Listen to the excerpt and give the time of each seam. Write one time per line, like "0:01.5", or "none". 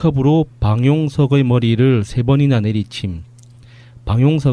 0:01.5